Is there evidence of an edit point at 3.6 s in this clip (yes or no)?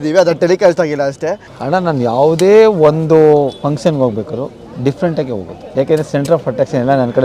yes